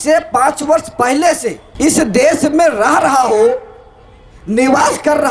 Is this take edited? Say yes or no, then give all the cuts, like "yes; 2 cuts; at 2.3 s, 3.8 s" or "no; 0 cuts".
yes; 1 cut; at 1.6 s